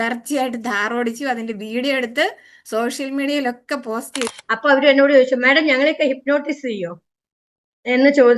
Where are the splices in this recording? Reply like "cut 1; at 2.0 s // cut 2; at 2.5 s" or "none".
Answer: cut 1; at 4.2 s